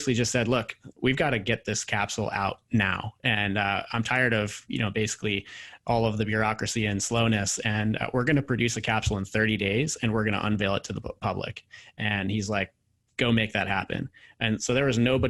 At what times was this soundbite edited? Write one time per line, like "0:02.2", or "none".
none